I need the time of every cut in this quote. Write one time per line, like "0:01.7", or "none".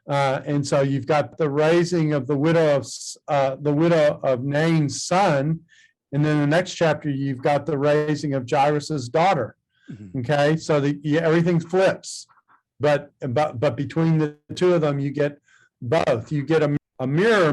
0:01.3
0:16.7